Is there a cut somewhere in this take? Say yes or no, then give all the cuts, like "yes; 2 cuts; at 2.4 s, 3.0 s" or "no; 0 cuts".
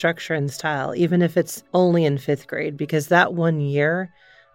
yes; 1 cut; at 1.6 s